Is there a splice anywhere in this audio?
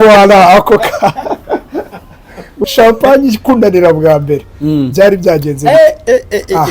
yes; 1 cut; at 2.6 s

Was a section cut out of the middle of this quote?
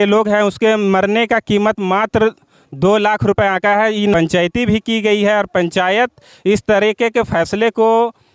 yes; 1 cut; at 4.1 s

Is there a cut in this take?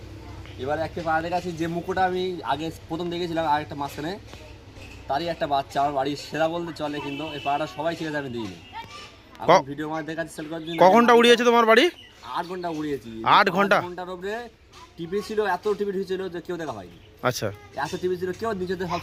no; 0 cuts

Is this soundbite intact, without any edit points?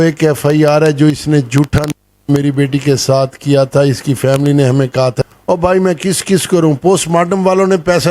no; 1 cut; at 5.2 s

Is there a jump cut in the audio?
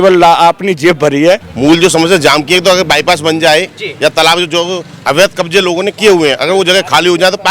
yes; 1 cut; at 1.5 s

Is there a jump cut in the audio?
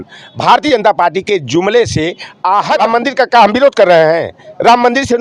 yes; 1 cut; at 2.8 s

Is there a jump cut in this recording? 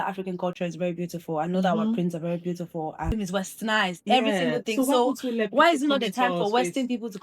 yes; 1 cut; at 3.1 s

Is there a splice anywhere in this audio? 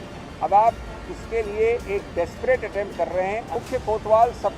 yes; 1 cut; at 3.6 s

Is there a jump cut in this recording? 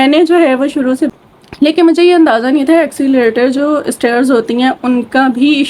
yes; 1 cut; at 1.1 s

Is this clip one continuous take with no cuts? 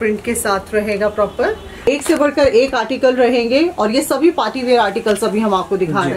no; 1 cut; at 1.9 s

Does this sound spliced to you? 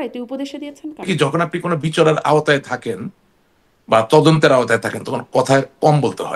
yes; 1 cut; at 1.1 s

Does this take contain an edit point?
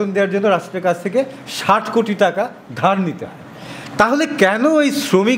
no; 0 cuts

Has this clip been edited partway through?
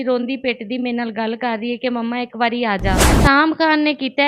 yes; 1 cut; at 3.2 s

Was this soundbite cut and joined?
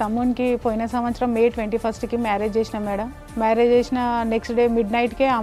no; 0 cuts

